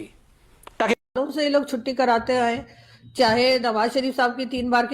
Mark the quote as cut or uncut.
cut